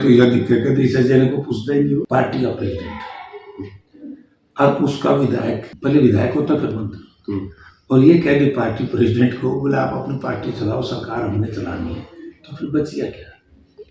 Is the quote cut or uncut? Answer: cut